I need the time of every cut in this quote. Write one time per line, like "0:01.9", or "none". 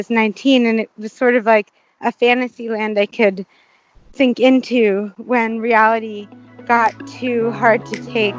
none